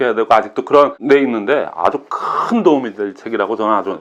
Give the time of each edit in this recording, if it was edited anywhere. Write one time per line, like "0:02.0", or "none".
0:01.0